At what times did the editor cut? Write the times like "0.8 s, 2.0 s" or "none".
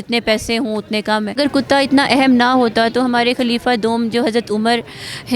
1.4 s